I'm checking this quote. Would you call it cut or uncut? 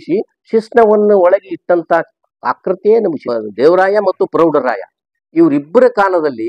cut